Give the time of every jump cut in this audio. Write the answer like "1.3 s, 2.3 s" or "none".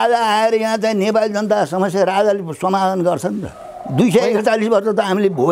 none